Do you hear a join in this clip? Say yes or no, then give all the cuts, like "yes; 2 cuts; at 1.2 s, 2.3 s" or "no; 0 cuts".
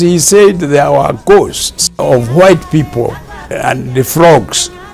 yes; 2 cuts; at 2.0 s, 3.4 s